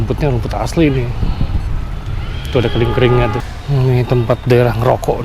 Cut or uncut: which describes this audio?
cut